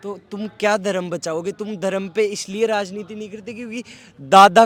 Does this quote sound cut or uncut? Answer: uncut